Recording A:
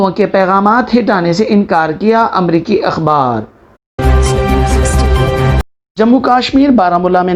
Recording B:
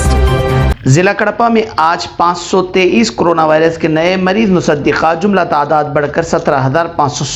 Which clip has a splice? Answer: A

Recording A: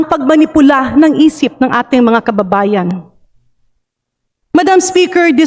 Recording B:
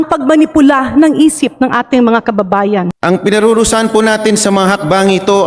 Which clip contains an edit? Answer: B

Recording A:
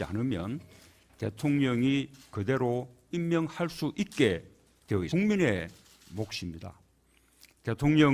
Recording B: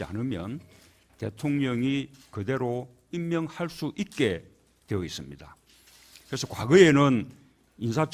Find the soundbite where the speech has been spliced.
B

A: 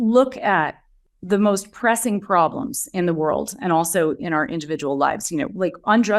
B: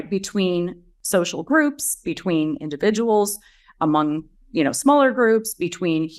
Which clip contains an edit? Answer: B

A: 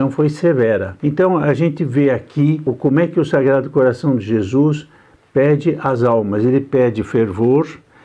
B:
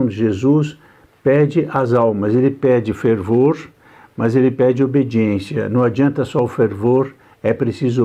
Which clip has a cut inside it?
A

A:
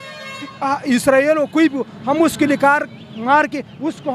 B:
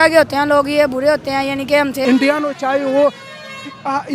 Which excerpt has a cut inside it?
B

